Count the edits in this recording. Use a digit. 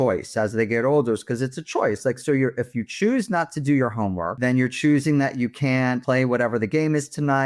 2